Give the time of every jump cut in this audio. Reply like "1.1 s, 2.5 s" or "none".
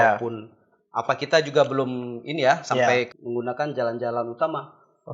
3.1 s